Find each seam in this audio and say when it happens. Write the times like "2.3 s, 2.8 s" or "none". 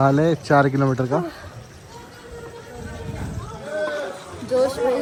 none

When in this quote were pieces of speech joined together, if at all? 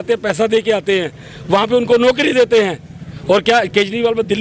none

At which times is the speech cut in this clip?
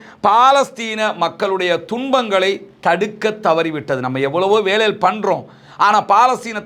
none

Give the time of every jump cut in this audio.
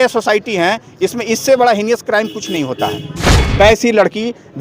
3.3 s

